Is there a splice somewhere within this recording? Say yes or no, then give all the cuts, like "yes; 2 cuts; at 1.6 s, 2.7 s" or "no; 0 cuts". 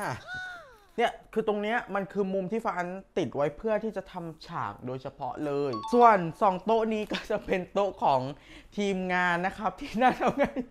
yes; 2 cuts; at 0.9 s, 5.8 s